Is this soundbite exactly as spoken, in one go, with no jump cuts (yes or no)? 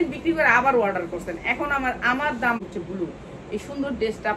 no